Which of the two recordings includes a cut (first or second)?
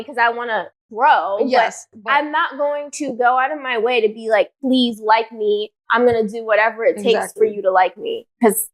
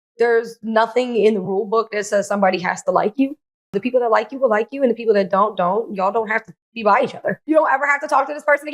second